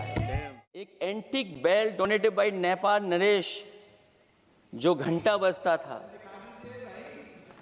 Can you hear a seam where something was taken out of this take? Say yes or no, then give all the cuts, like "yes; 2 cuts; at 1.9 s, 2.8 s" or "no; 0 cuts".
yes; 1 cut; at 0.9 s